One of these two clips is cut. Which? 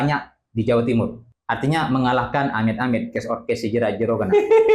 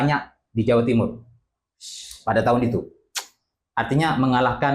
first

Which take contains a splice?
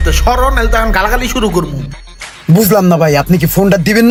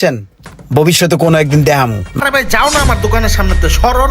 second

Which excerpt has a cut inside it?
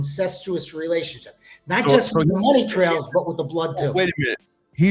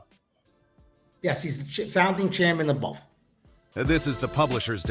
second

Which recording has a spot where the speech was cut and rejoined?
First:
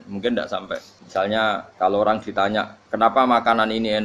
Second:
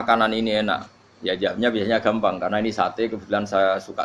first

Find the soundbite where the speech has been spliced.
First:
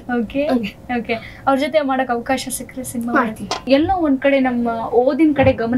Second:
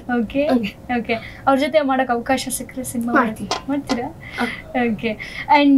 first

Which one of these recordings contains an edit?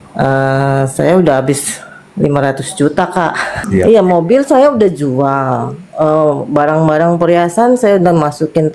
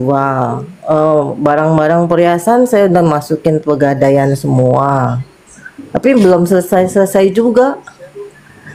first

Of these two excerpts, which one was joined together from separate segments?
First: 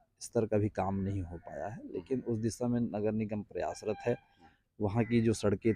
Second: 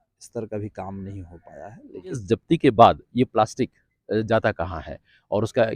second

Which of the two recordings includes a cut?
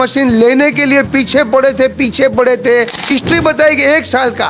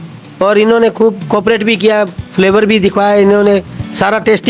first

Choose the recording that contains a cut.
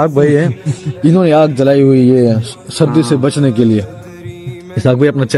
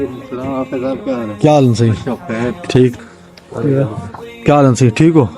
second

